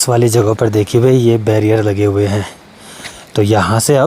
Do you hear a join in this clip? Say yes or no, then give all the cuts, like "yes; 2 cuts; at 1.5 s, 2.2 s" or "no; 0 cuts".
no; 0 cuts